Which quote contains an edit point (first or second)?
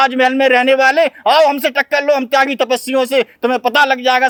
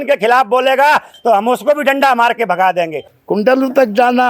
second